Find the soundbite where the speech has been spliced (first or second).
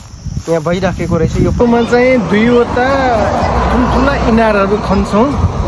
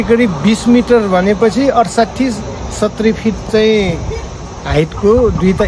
first